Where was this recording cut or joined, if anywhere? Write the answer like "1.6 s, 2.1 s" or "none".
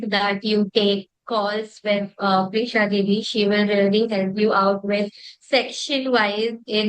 none